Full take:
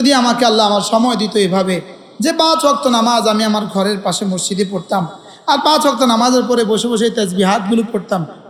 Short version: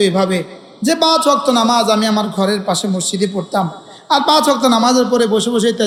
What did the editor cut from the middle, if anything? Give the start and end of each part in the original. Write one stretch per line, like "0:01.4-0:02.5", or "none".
none